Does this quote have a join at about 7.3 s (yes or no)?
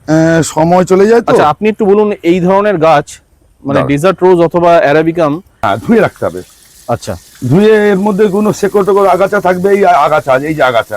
no